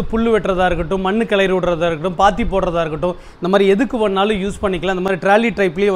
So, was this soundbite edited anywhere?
no; 0 cuts

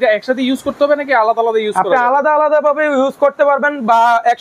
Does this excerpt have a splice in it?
no; 0 cuts

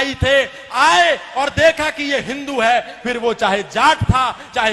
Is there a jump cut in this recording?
no; 0 cuts

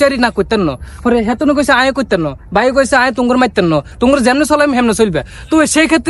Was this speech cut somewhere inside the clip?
yes; 1 cut; at 3.9 s

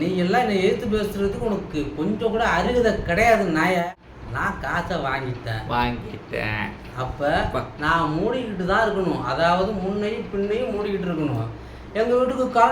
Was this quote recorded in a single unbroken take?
no; 1 cut; at 3.9 s

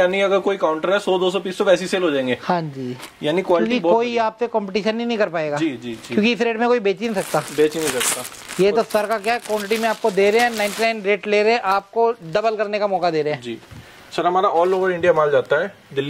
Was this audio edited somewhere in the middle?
no; 0 cuts

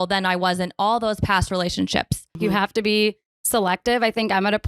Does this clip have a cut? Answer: yes; 1 cut; at 2.4 s

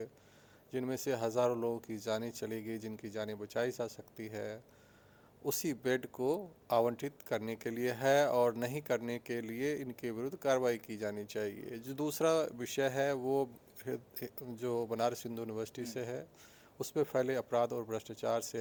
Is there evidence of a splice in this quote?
no; 0 cuts

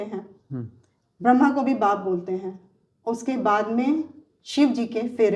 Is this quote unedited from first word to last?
yes; 0 cuts

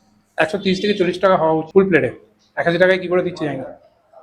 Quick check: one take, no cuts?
no; 1 cut; at 1.7 s

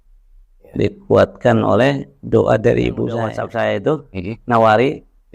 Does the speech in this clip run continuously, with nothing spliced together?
no; 1 cut; at 3.3 s

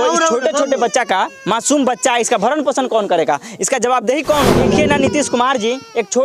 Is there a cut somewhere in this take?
yes; 1 cut; at 4.6 s

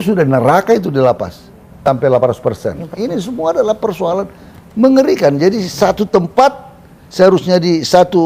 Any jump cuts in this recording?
yes; 1 cut; at 1.8 s

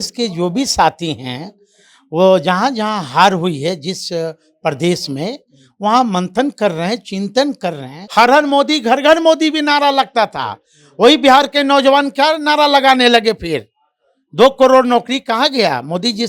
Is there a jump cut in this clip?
yes; 1 cut; at 8.0 s

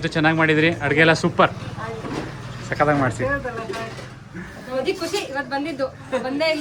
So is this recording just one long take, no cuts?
yes; 0 cuts

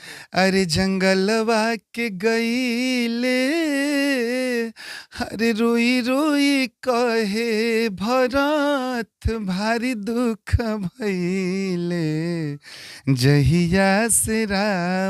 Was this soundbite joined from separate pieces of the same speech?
no; 0 cuts

